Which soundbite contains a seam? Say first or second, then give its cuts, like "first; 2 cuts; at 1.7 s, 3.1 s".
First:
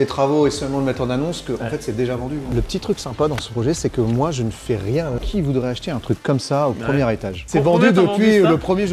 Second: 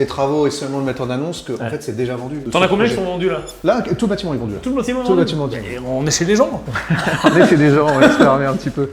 first; 3 cuts; at 2.4 s, 5.2 s, 7.4 s